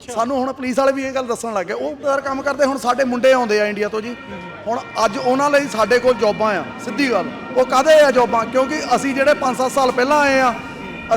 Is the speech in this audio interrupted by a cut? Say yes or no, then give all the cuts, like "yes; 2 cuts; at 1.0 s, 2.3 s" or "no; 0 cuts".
yes; 1 cut; at 2.0 s